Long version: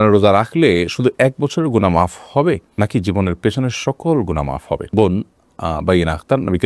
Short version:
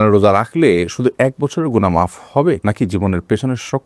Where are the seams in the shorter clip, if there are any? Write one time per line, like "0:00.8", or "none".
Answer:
0:02.6